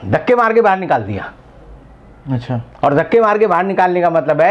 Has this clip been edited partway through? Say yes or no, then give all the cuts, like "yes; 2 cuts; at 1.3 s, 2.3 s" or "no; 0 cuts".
no; 0 cuts